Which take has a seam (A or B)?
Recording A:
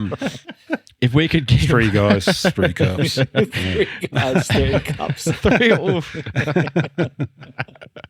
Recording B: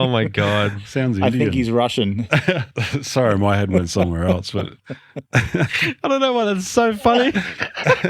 B